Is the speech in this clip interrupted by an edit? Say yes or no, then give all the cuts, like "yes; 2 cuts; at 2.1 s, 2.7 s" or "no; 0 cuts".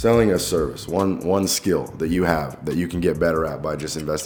no; 0 cuts